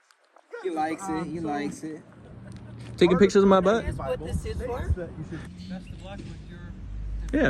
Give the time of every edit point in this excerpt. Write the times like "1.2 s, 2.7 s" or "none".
5.4 s

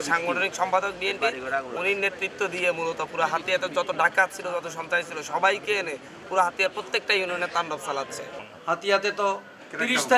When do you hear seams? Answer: 8.5 s

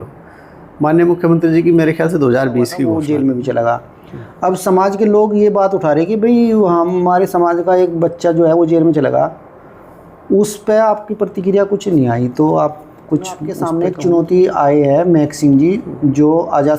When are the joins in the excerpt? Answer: 2.9 s, 13.6 s

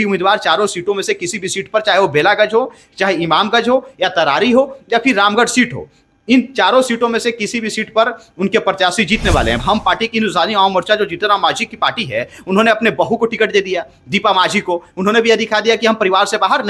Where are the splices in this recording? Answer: 9.6 s

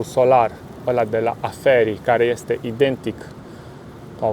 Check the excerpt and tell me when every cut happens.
none

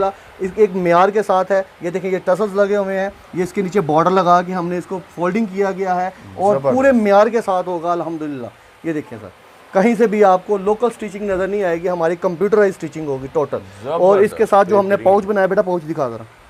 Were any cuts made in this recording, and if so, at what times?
none

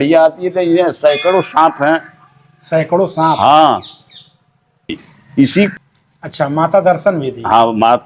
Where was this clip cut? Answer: 5.7 s

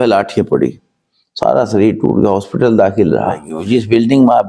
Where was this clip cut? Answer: 3.5 s

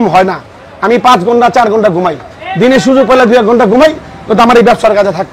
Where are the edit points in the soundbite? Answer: none

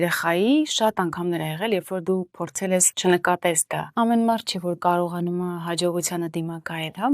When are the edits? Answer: 2.9 s, 3.8 s

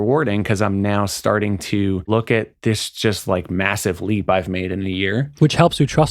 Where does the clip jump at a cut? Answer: 2.1 s, 5.3 s

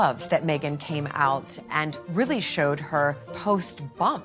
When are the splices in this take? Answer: 3.3 s

